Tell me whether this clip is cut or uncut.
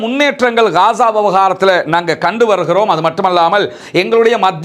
uncut